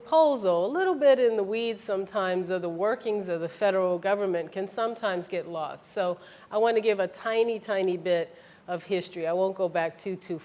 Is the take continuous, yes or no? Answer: yes